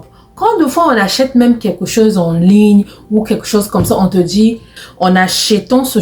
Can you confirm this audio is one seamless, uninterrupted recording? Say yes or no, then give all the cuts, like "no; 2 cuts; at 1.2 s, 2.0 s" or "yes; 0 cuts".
no; 1 cut; at 4.8 s